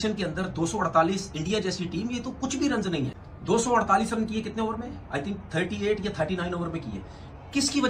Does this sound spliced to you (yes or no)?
yes